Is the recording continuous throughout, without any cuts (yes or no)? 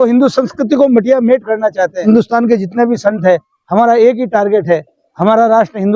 no